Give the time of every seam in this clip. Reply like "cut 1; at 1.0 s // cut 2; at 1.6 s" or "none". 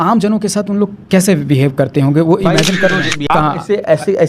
cut 1; at 3.3 s